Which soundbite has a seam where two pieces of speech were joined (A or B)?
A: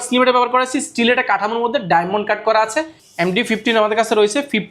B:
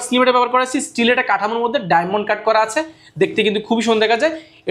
A